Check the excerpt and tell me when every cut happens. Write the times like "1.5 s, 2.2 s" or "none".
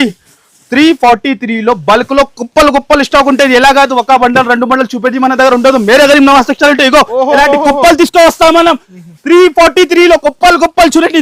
none